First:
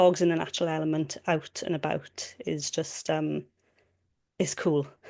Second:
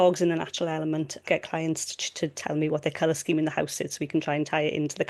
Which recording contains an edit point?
second; 1 cut; at 1.2 s

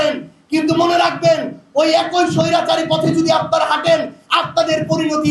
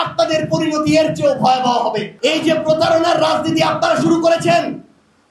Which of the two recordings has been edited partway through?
second; 1 cut; at 2.1 s

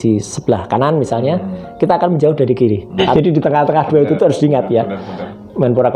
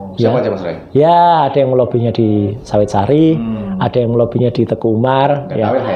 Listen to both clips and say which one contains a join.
first; 1 cut; at 3.0 s

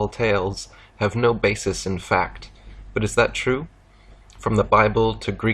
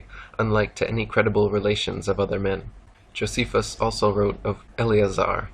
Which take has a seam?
second; 1 cut; at 1.2 s

